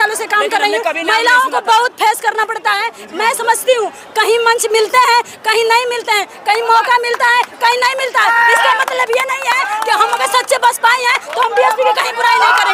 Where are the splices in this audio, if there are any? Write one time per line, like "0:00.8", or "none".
none